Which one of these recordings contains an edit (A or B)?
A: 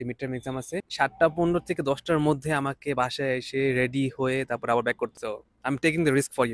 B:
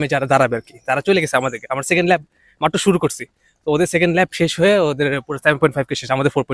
A